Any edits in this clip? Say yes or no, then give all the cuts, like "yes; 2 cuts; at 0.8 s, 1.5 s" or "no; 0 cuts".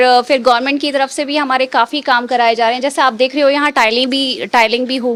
no; 0 cuts